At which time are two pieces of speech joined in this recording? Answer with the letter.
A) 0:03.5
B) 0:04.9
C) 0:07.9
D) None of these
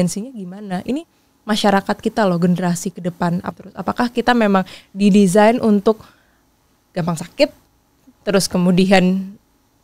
A